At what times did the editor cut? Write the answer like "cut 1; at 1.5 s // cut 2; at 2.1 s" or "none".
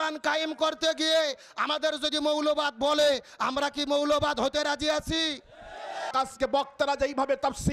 cut 1; at 6.1 s